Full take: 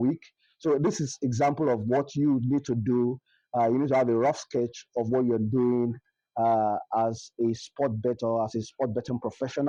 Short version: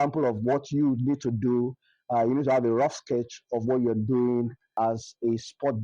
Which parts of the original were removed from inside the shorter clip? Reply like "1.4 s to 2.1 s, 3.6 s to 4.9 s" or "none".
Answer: 6.1 s to 6.8 s